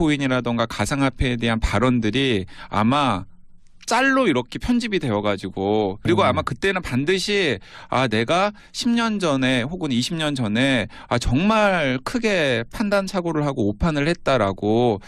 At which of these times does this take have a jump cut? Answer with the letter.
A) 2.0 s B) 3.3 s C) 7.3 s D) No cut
D